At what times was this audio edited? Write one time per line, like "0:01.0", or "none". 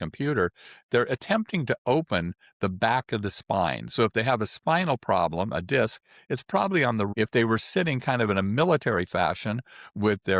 0:07.1

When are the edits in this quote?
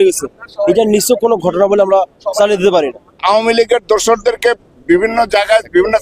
0:03.2

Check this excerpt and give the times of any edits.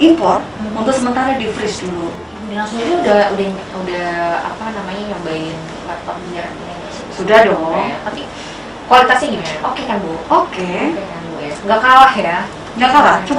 0:02.5

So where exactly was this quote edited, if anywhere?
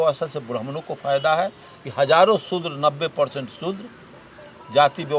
none

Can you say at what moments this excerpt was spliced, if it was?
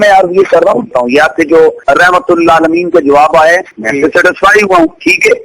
0:00.9
0:01.8
0:03.8

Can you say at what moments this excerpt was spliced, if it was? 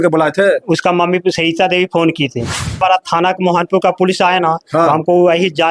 0:02.8

